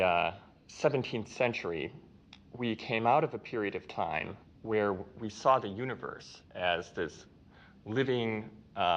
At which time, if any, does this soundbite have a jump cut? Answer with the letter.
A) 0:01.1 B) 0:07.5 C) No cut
A